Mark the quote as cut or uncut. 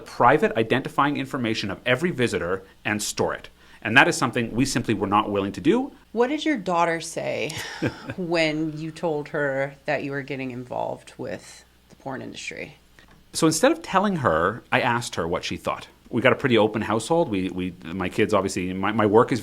cut